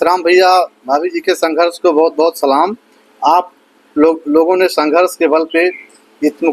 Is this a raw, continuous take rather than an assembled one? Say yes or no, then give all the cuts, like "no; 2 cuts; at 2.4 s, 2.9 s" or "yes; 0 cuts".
yes; 0 cuts